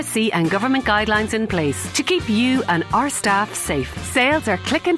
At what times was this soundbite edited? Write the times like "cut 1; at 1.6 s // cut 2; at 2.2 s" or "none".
none